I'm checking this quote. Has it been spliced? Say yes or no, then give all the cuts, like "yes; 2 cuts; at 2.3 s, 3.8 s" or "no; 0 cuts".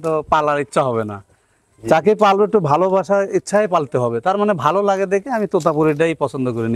no; 0 cuts